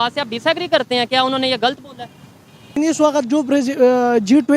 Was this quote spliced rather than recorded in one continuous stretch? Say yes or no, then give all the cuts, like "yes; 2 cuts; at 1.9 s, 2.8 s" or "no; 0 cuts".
yes; 1 cut; at 2.7 s